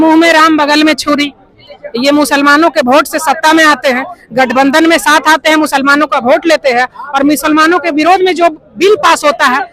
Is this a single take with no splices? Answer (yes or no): yes